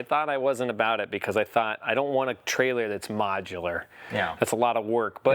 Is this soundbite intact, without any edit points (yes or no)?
yes